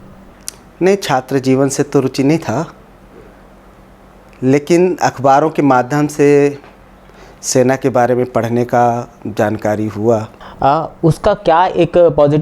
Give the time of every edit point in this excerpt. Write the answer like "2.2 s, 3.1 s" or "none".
10.4 s